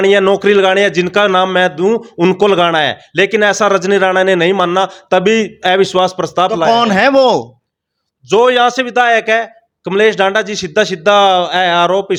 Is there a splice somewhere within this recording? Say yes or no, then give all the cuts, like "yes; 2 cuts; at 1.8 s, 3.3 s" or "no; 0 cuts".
no; 0 cuts